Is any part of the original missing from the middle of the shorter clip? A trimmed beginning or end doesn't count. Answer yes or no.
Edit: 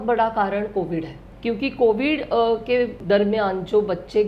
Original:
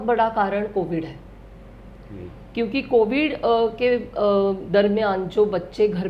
yes